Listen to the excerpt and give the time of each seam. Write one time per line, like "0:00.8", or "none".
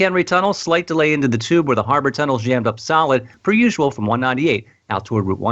0:03.3